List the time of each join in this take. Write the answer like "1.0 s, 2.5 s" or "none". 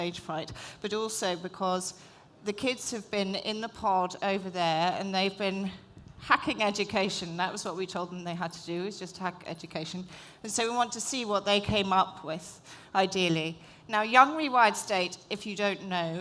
12.4 s